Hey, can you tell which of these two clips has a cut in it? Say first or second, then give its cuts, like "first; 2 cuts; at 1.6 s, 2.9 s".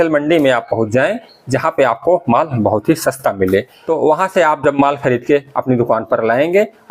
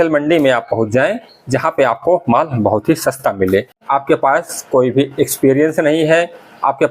second; 1 cut; at 3.8 s